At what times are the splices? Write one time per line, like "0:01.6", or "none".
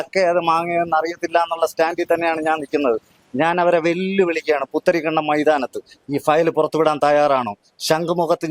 none